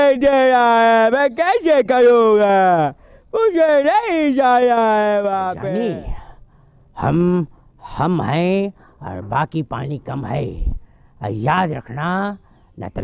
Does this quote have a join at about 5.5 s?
yes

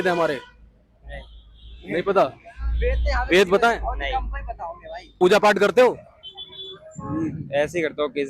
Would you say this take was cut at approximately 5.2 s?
yes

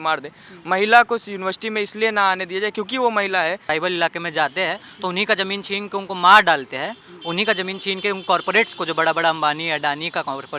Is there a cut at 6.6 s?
no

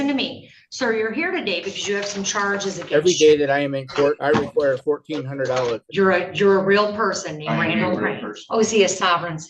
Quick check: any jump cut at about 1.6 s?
no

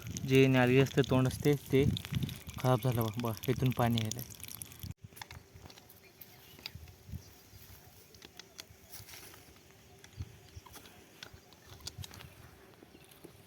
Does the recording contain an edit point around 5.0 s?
yes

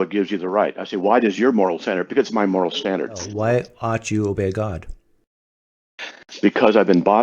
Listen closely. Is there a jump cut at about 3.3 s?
yes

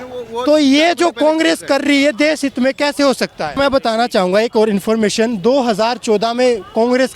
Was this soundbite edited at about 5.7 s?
no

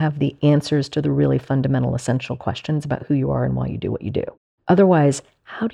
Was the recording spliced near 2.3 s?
no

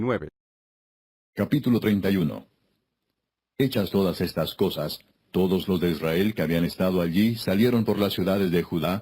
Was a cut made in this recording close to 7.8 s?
yes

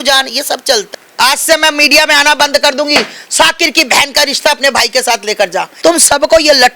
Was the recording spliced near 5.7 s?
yes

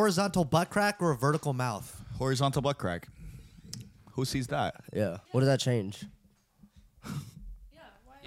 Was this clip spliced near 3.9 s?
no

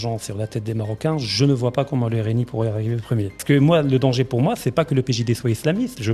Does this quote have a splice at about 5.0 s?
no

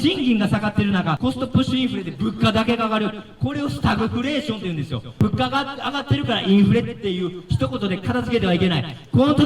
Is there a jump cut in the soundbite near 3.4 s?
no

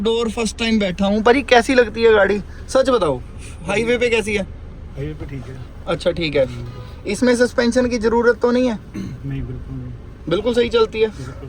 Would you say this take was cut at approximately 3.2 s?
no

